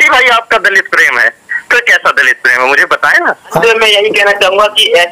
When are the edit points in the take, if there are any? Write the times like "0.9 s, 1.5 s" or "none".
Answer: 3.6 s